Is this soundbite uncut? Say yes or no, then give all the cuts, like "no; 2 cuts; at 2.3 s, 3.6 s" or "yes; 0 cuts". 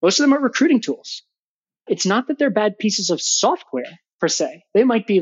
no; 1 cut; at 1.8 s